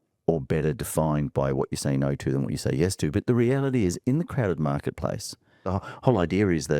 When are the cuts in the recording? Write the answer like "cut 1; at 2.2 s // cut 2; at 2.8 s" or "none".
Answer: cut 1; at 5.7 s